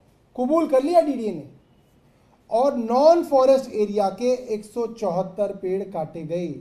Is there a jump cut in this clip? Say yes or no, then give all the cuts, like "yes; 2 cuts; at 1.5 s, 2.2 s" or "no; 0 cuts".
no; 0 cuts